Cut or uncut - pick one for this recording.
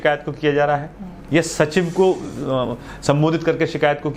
uncut